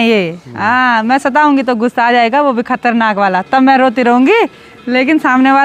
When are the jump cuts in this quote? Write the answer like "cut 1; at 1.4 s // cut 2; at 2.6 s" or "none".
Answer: none

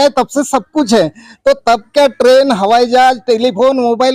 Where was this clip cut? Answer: none

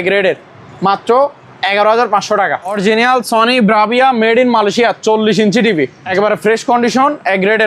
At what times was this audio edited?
cut 1; at 2.8 s // cut 2; at 6.0 s

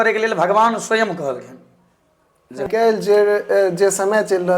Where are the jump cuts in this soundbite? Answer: cut 1; at 2.7 s

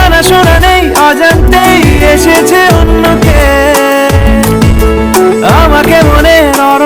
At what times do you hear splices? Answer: none

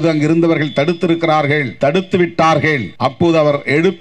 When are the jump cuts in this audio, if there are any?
cut 1; at 1.7 s // cut 2; at 2.9 s

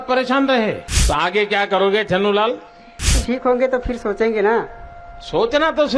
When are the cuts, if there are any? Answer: cut 1; at 1.0 s // cut 2; at 3.1 s

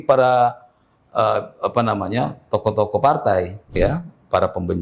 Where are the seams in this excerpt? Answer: cut 1; at 3.8 s

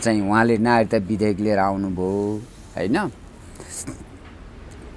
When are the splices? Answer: none

